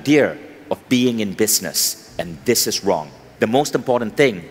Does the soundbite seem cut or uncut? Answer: cut